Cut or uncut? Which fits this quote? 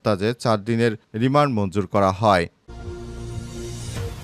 cut